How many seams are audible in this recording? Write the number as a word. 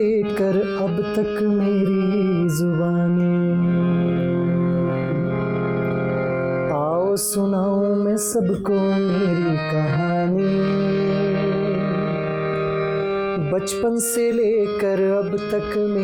zero